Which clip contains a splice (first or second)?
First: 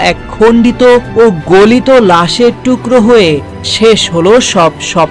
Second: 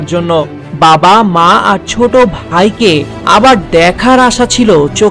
first